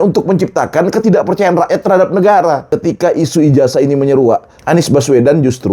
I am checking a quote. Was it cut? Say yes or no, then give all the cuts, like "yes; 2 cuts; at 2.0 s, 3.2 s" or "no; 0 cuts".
yes; 2 cuts; at 2.6 s, 4.5 s